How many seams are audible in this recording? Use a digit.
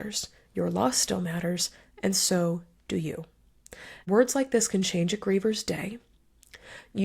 1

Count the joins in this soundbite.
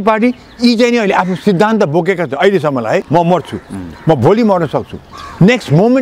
1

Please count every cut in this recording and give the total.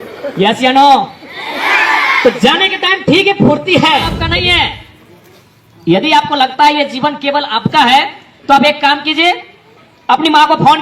1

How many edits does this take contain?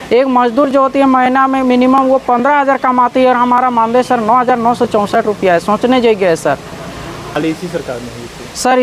1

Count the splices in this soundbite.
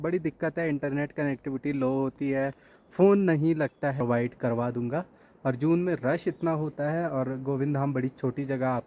1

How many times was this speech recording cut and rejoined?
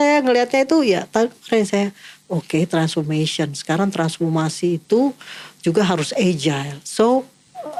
0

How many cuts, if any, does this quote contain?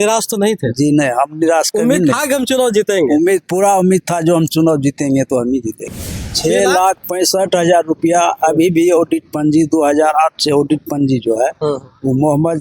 1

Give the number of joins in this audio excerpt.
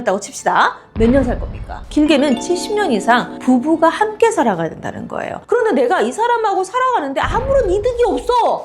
1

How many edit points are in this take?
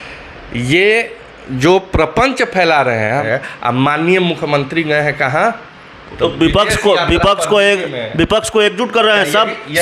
1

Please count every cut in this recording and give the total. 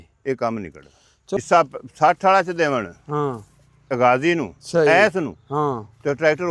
1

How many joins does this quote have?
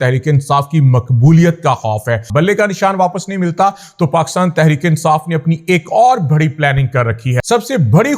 2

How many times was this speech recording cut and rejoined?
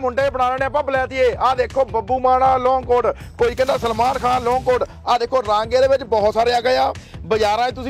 0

